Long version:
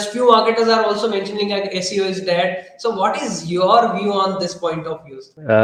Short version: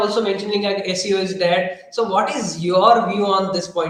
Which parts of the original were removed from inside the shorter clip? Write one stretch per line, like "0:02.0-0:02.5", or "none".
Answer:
none